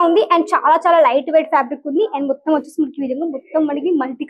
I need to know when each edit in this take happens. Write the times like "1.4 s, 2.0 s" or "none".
none